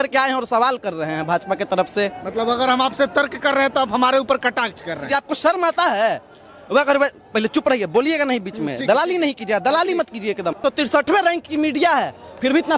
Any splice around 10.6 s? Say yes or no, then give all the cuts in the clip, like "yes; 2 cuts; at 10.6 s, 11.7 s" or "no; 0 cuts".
yes; 2 cuts; at 5.0 s, 10.6 s